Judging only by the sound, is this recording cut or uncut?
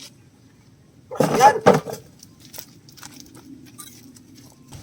uncut